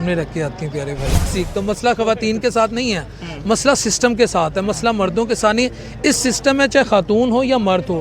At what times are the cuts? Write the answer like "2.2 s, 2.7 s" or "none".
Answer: 1.3 s